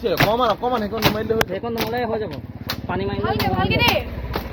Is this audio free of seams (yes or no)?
yes